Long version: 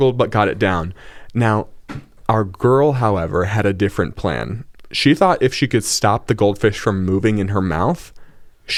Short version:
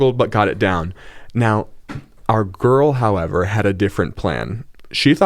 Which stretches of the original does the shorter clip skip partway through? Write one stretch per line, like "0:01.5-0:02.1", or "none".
none